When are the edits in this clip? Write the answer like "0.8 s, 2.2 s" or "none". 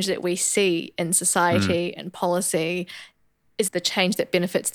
none